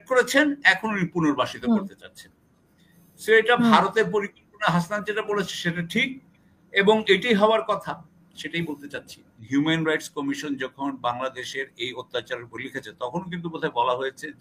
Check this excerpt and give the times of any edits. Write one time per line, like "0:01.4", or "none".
0:09.3